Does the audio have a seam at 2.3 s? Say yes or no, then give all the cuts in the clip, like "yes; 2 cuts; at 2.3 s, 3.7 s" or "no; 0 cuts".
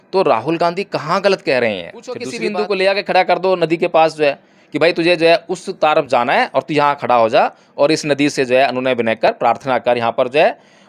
yes; 1 cut; at 2.3 s